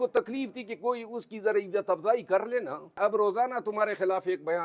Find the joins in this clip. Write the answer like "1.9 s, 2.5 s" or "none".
3.0 s